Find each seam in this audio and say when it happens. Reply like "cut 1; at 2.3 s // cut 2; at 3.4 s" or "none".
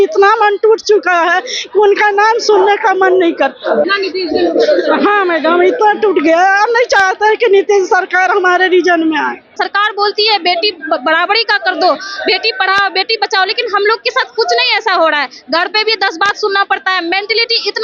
cut 1; at 3.9 s // cut 2; at 9.5 s